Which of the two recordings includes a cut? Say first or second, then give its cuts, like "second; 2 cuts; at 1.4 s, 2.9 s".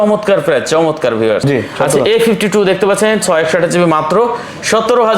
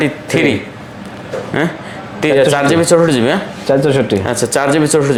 first; 1 cut; at 1.4 s